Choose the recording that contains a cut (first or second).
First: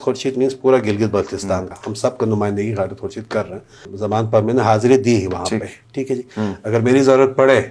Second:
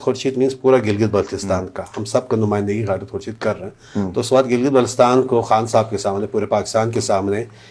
first